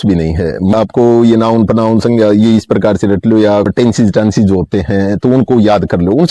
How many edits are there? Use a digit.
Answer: 2